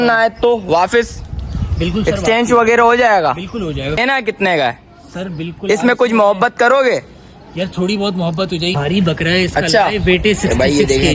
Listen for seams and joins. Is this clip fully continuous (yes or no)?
no